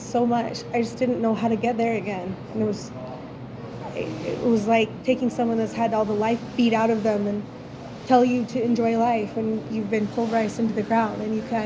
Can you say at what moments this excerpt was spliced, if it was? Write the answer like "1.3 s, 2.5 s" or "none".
none